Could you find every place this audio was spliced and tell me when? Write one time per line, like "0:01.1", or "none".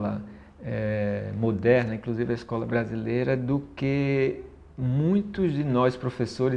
none